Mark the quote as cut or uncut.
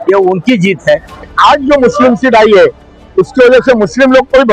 cut